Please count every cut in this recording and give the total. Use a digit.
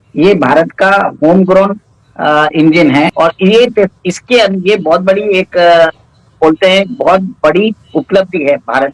1